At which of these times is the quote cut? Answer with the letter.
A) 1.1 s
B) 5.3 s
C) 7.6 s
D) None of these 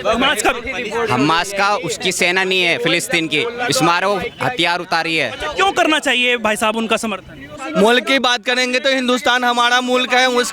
C